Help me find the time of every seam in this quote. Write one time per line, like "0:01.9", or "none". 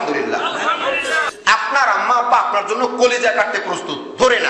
0:01.1